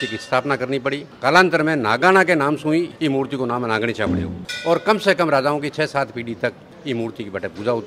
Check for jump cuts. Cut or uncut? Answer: uncut